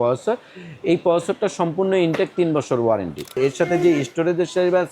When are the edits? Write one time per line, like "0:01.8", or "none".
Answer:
0:03.3